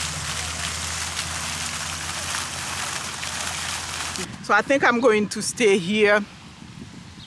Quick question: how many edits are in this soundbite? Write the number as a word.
one